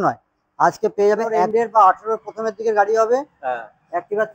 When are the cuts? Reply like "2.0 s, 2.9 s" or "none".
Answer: 1.5 s